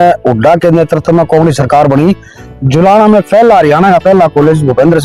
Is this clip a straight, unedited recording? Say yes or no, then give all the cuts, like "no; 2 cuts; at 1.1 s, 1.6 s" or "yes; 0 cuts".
yes; 0 cuts